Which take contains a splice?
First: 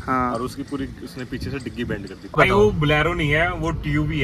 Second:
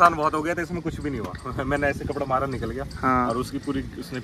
first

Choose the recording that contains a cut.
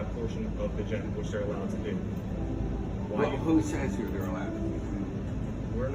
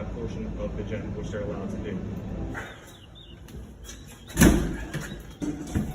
second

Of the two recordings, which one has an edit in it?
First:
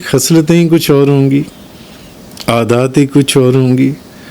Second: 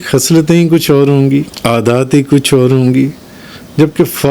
second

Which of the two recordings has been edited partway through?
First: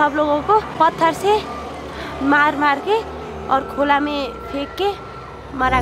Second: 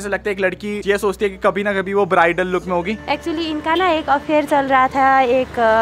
second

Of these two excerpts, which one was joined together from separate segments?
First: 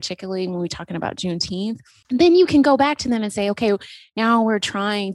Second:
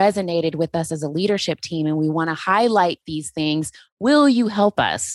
first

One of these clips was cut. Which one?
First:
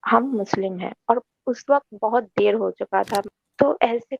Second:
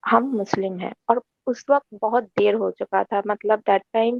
first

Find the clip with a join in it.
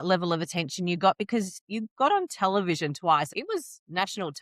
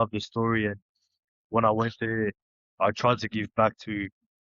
first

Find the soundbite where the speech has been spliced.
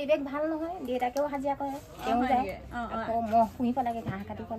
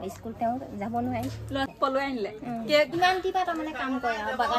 second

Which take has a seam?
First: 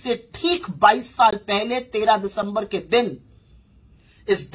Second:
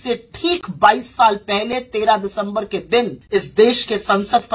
second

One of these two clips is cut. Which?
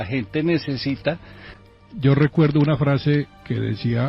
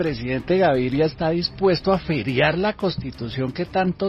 first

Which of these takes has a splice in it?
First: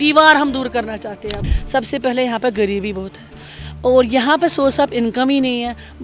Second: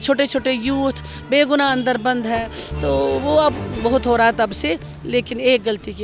first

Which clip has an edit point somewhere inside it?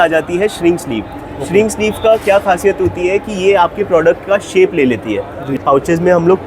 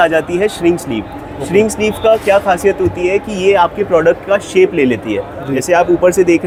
first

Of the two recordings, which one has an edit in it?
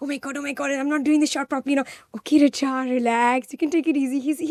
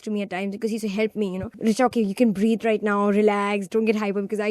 second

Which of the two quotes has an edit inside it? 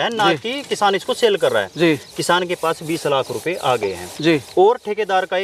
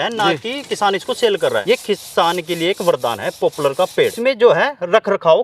second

